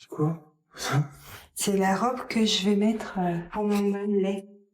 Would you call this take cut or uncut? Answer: cut